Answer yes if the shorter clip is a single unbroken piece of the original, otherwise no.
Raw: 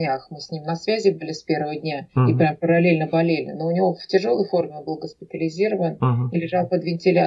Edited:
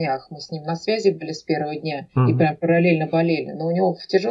yes